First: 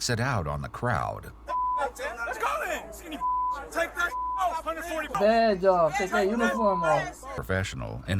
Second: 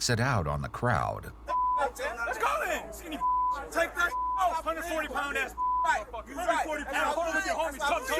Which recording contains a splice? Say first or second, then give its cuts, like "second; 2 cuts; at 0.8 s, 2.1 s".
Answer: first; 2 cuts; at 5.2 s, 7.4 s